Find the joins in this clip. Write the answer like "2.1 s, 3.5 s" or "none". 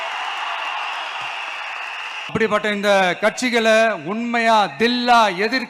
2.3 s